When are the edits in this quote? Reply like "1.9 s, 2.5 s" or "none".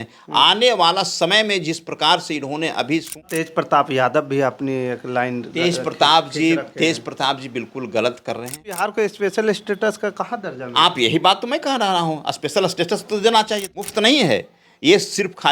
3.5 s, 8.8 s, 13.9 s